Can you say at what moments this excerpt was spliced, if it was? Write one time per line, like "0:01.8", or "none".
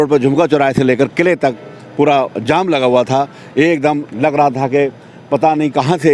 none